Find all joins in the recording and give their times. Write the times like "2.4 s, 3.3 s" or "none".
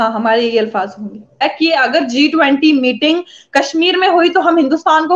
1.4 s